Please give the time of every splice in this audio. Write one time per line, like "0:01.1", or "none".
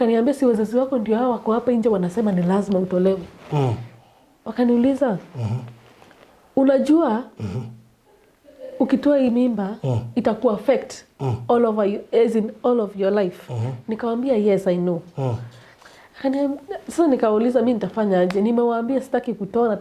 none